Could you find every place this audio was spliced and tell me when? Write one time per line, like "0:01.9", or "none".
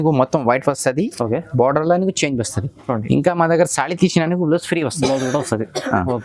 none